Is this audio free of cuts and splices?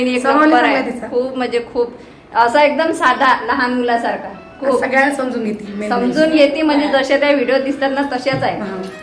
yes; 0 cuts

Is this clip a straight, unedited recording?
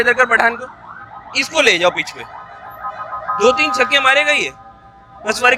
yes; 0 cuts

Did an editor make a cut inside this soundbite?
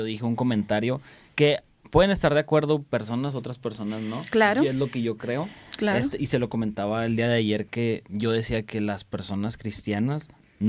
no; 0 cuts

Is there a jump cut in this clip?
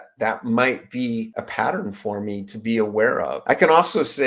yes; 2 cuts; at 1.4 s, 3.4 s

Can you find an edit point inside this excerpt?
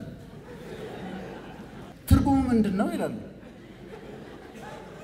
yes; 1 cut; at 2.0 s

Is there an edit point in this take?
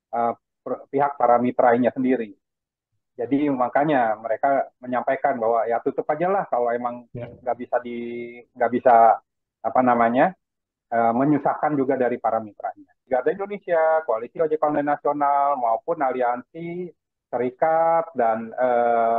yes; 1 cut; at 13.1 s

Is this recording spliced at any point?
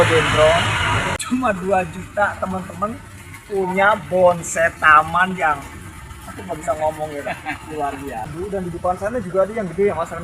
yes; 2 cuts; at 1.2 s, 8.3 s

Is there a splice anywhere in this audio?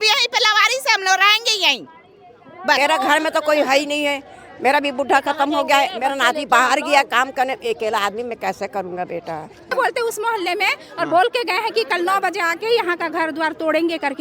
yes; 2 cuts; at 2.8 s, 9.7 s

